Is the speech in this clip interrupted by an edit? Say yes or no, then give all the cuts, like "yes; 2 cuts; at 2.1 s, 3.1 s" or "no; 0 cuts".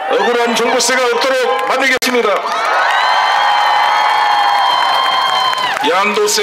no; 0 cuts